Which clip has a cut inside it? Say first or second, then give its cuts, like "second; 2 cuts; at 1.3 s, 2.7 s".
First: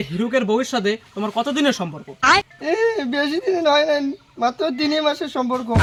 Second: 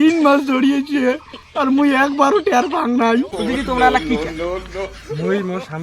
second; 1 cut; at 3.3 s